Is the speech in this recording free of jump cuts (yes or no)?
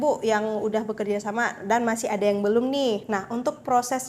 no